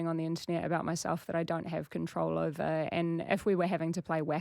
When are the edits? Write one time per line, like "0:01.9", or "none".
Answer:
0:02.9